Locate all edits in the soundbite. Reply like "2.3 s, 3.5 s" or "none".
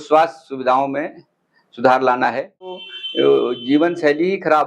2.9 s